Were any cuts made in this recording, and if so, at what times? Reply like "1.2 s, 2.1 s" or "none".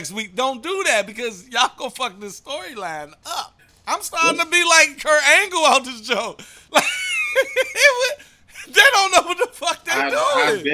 3.7 s